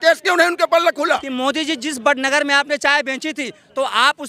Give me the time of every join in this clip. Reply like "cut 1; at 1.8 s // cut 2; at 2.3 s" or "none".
cut 1; at 1.3 s